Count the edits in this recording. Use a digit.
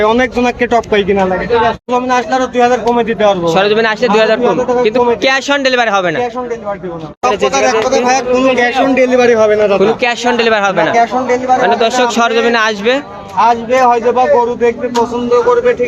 2